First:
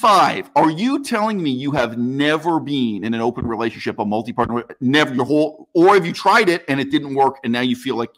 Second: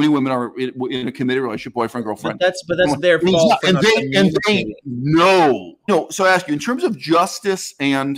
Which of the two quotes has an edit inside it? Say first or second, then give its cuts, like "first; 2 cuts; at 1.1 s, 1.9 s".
second; 1 cut; at 5.9 s